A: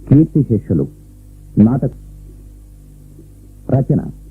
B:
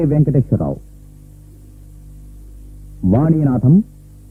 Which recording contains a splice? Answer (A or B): A